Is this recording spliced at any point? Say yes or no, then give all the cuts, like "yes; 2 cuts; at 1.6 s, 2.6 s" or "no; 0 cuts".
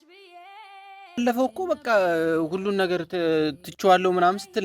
yes; 1 cut; at 1.2 s